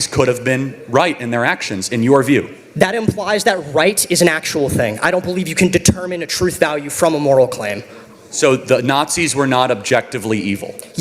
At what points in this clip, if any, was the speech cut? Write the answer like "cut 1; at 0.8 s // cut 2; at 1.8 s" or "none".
none